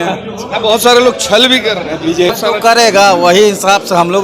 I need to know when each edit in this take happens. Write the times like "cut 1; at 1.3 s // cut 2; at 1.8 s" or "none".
cut 1; at 2.3 s